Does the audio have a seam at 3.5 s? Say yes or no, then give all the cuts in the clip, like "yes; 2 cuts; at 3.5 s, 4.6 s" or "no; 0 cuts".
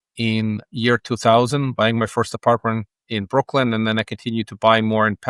no; 0 cuts